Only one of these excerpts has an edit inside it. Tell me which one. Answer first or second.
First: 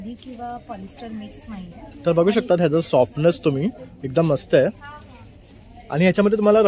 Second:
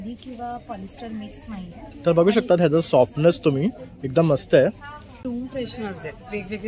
second